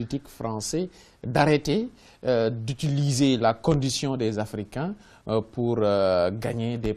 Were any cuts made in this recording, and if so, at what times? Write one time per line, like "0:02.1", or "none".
0:02.0